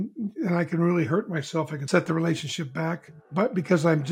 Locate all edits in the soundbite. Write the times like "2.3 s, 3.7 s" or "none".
1.8 s, 3.1 s

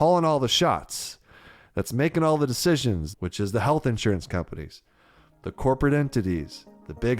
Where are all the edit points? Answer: 3.0 s

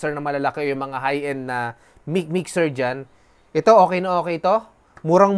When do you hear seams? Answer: none

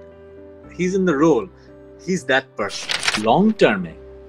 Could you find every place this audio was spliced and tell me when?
3.2 s

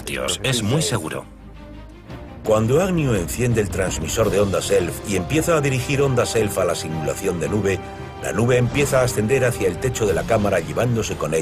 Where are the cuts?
4.8 s

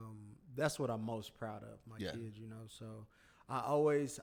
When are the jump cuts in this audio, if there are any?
none

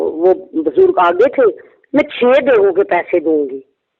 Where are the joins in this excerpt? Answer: 1.7 s

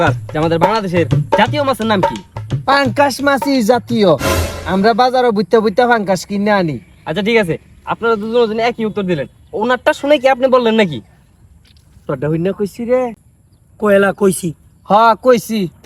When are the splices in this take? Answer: none

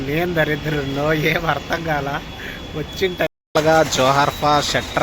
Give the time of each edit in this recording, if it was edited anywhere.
3.3 s

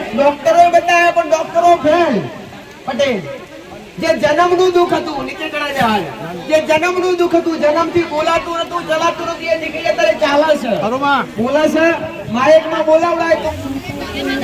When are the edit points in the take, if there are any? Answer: 13.5 s

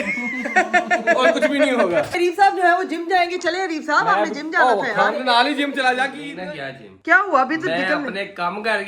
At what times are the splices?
2.1 s, 6.3 s

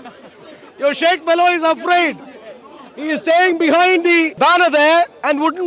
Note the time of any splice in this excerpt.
4.3 s

